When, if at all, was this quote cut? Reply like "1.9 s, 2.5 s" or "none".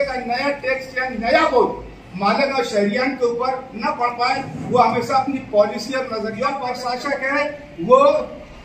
6.6 s

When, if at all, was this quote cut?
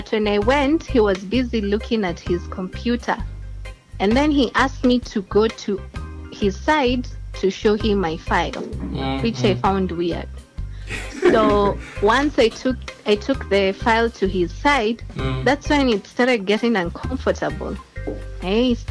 none

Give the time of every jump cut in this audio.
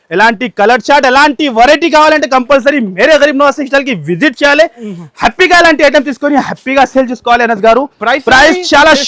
none

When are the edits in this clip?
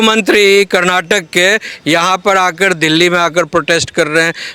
none

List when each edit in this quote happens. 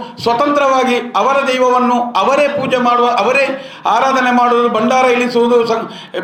none

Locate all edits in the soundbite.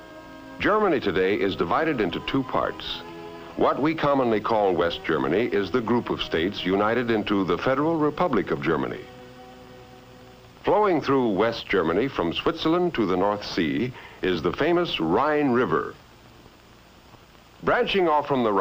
none

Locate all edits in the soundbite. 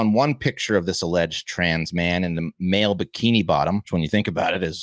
3.9 s

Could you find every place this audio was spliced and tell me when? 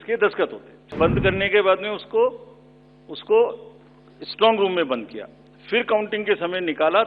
1.0 s

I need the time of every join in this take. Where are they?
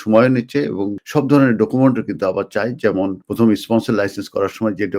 0.9 s, 3.2 s

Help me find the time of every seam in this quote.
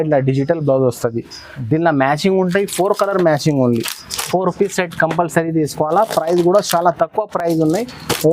none

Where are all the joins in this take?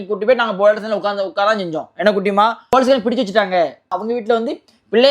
2.7 s, 3.9 s

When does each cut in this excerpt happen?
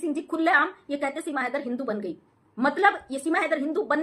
none

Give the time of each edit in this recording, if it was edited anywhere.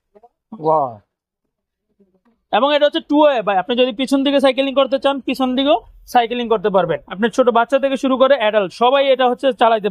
7.0 s

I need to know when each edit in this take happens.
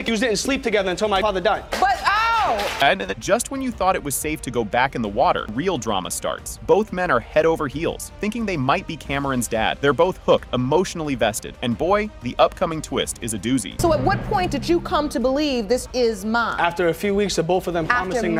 none

